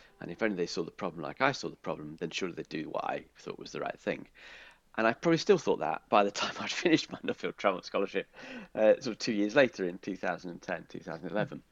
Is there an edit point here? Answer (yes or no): no